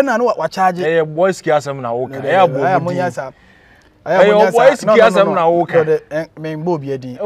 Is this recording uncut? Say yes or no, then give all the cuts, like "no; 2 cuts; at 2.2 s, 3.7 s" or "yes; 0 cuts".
yes; 0 cuts